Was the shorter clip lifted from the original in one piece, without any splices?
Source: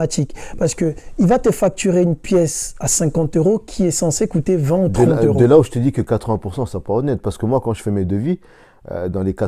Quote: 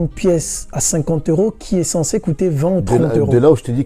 yes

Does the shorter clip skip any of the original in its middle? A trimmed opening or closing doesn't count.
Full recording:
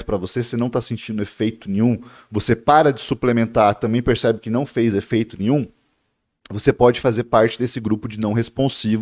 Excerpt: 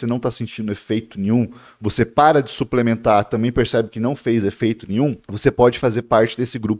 yes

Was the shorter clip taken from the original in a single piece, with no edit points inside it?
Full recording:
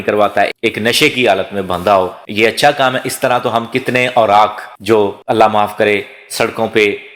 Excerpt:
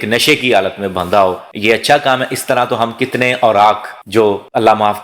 yes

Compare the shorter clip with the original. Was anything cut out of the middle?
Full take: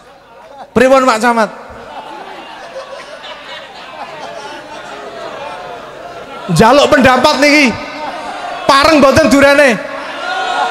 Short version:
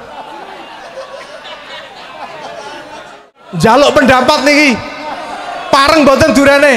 yes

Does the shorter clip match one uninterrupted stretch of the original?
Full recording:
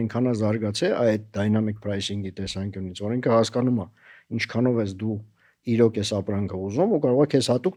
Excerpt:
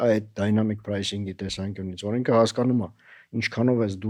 yes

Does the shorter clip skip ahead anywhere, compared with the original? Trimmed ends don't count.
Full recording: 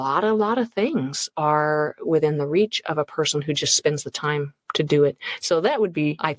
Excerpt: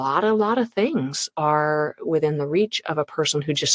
no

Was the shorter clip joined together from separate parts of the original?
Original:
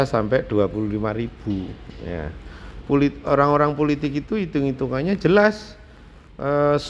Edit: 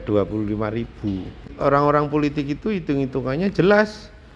yes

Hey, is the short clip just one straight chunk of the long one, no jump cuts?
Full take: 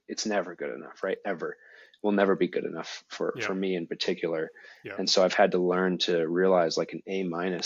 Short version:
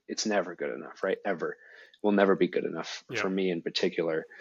no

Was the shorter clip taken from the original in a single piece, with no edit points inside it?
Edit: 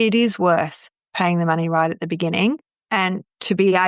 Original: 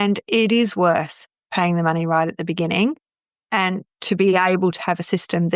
no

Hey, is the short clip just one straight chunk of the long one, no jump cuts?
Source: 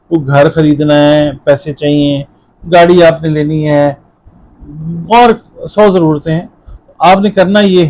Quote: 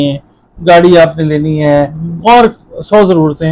no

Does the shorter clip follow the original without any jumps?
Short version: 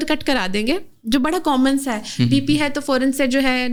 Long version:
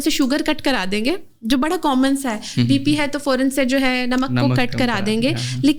yes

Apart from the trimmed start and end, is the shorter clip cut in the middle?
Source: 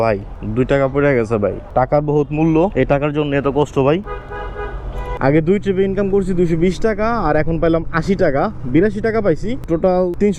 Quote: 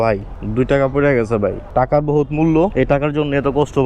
no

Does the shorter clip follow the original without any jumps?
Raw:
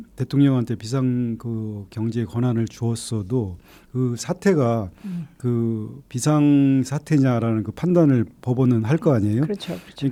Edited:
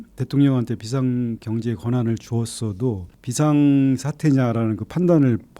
no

